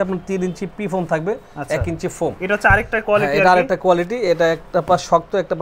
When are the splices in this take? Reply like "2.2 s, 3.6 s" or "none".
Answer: none